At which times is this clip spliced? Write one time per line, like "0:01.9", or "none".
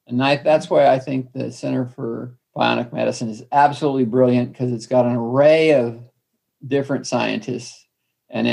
0:02.4